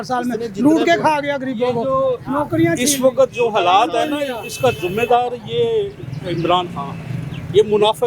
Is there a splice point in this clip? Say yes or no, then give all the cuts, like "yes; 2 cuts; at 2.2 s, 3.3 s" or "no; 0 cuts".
no; 0 cuts